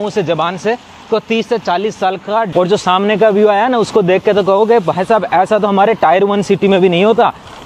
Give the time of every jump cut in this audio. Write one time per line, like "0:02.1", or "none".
0:02.5